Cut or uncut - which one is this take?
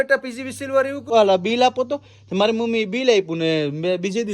cut